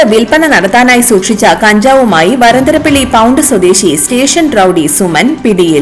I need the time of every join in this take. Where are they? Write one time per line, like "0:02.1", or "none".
none